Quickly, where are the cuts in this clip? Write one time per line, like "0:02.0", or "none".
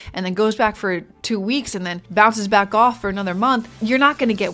0:01.1
0:02.0
0:03.7